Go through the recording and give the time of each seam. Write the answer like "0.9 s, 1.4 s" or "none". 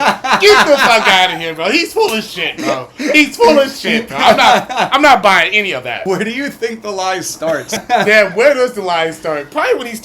6.0 s, 7.8 s